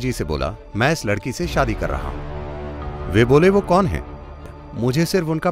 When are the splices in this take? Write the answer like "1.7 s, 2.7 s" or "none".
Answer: 4.6 s